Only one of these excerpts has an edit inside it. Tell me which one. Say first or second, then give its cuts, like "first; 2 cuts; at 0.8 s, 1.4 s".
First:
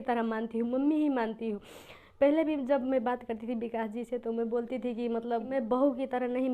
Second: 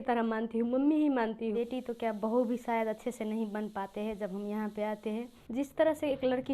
second; 2 cuts; at 1.6 s, 5.4 s